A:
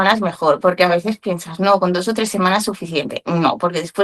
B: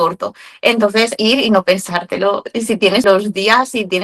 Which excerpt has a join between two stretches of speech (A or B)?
B